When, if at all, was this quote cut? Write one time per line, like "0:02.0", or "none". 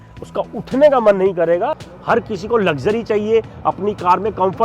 0:01.9